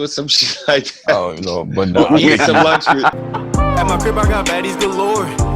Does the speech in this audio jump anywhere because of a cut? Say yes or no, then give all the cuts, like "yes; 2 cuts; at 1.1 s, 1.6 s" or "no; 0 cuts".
yes; 1 cut; at 3.1 s